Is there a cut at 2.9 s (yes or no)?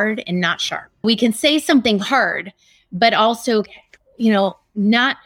no